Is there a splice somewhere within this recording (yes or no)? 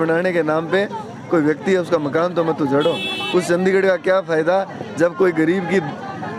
no